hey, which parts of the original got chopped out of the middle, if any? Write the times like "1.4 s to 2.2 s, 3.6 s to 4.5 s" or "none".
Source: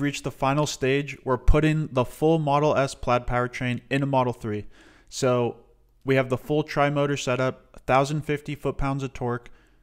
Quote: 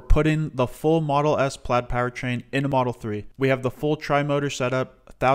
4.2 s to 5.5 s